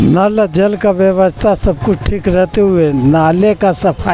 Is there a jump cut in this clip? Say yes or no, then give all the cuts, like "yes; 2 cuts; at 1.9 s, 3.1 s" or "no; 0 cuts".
no; 0 cuts